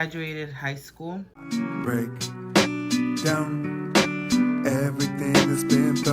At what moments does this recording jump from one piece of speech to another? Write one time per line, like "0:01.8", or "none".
0:01.3